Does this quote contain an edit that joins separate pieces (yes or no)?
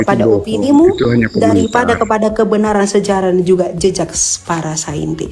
no